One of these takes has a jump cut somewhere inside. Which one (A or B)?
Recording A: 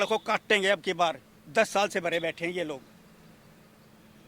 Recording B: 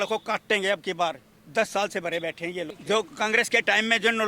B